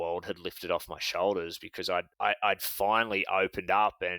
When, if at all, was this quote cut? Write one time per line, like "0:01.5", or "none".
0:02.1